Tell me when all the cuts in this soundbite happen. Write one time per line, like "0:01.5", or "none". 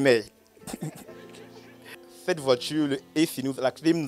0:01.9